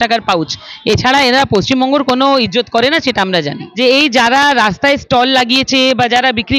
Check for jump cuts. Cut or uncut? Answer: cut